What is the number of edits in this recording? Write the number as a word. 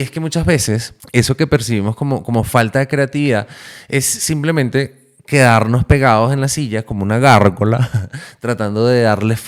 one